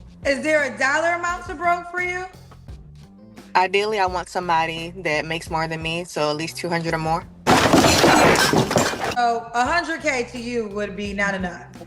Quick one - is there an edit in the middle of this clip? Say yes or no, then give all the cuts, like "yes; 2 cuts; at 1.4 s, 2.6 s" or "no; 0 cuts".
yes; 2 cuts; at 7.5 s, 9.2 s